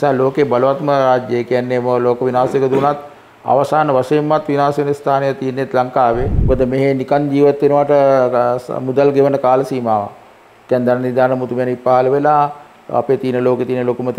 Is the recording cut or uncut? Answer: cut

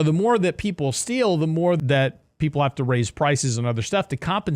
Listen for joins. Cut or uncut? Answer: cut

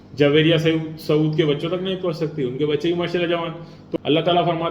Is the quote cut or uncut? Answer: cut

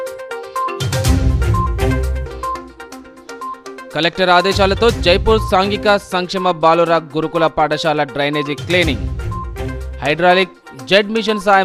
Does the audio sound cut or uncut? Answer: uncut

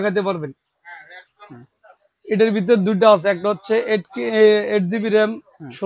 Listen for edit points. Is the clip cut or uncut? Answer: cut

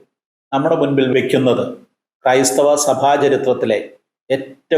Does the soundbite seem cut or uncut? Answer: cut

